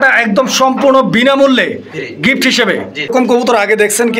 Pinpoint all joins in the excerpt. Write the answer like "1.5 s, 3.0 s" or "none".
3.1 s